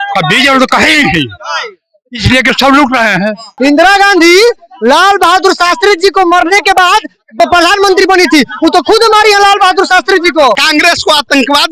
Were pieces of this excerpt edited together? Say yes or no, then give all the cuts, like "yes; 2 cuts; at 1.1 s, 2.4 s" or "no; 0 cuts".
yes; 2 cuts; at 3.4 s, 10.6 s